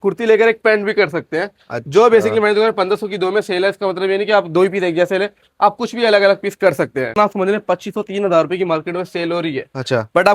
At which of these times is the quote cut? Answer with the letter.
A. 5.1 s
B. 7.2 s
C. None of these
B